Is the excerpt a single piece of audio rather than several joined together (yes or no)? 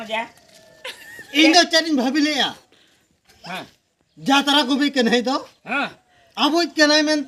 yes